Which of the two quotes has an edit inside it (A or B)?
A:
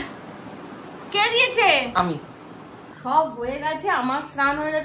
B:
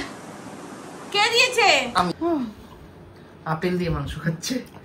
B